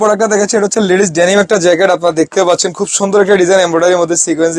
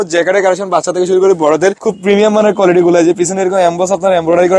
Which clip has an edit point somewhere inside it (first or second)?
second